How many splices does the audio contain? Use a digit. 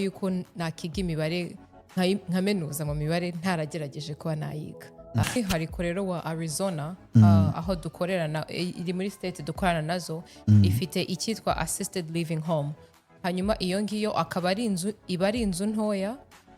1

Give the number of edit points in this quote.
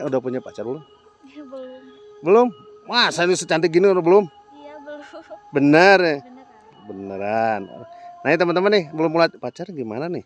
1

